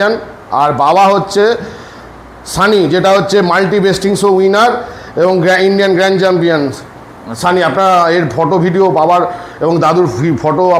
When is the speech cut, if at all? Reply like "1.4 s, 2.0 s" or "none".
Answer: none